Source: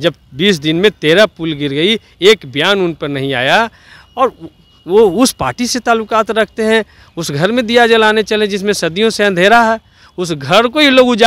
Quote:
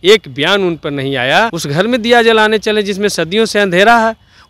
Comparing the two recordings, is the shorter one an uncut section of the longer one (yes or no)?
no